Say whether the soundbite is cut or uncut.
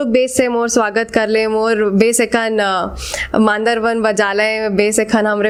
uncut